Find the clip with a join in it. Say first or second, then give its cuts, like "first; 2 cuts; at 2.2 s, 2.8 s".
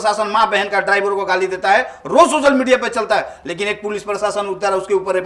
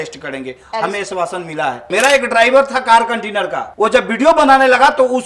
second; 2 cuts; at 1.8 s, 3.6 s